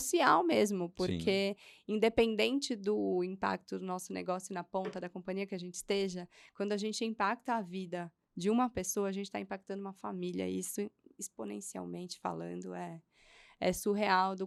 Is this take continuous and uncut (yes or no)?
yes